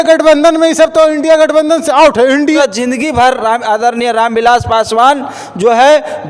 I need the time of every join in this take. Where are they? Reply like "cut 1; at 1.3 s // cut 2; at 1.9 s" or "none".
cut 1; at 2.5 s